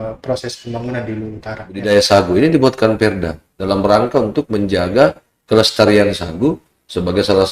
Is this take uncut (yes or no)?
no